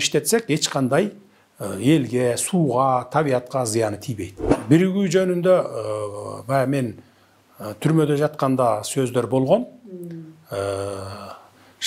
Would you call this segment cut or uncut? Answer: cut